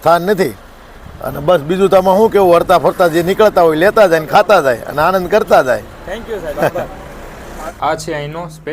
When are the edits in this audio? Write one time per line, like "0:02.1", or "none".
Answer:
0:07.6